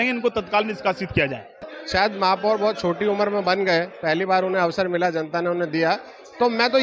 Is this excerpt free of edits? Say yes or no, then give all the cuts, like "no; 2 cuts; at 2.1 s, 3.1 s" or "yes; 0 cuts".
no; 1 cut; at 1.8 s